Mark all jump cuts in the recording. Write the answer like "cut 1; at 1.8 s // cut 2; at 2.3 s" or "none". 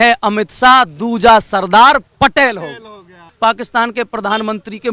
cut 1; at 3.3 s